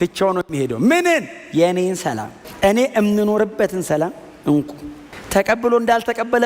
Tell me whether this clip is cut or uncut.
uncut